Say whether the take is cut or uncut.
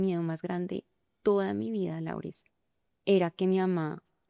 uncut